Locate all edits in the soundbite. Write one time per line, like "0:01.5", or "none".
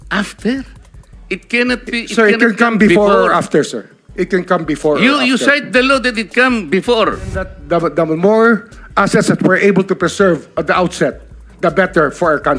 0:07.5